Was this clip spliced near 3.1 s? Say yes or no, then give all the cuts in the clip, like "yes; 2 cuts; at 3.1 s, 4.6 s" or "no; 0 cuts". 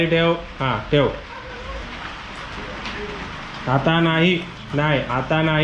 no; 1 cut; at 1.8 s